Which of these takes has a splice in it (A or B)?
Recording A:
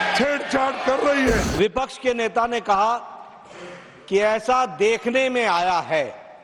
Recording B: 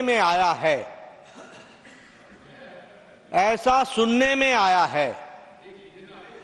A